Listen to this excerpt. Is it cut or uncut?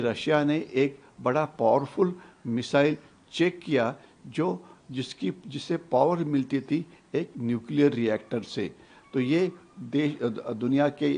uncut